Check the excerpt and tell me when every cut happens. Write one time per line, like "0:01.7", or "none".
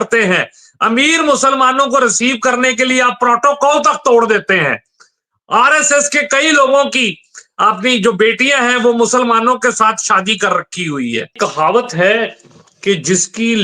0:11.3

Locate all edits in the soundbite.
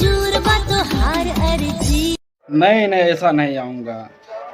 0:02.1

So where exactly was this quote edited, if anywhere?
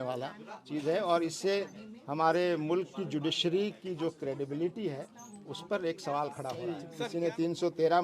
0:06.9

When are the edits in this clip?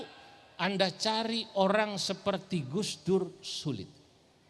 0:02.7

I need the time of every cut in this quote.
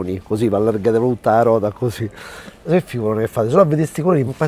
0:02.7

